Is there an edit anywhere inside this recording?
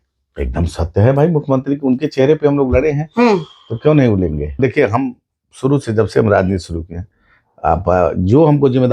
yes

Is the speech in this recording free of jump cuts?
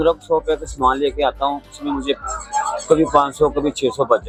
yes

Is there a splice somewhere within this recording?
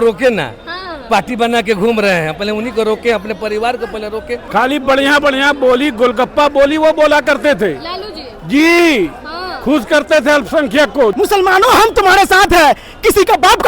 yes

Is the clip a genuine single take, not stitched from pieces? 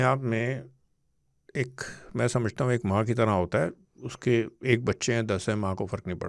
yes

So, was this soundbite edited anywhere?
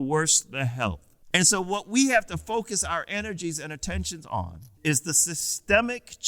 yes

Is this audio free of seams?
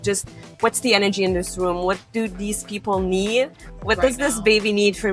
yes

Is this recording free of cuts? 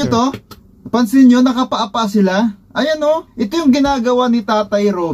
yes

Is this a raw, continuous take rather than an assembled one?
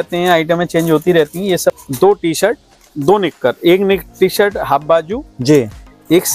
no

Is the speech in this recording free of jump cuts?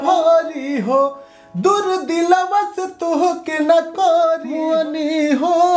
no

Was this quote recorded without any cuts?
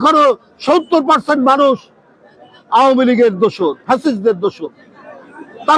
yes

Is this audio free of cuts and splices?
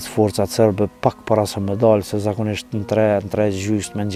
yes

